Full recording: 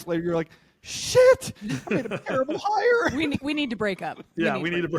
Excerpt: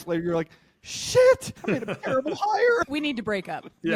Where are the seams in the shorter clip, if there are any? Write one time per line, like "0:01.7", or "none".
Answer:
0:01.5
0:02.9